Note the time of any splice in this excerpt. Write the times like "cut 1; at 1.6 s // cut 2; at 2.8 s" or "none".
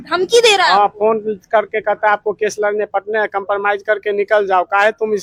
none